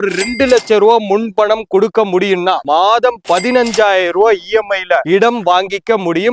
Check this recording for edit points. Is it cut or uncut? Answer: cut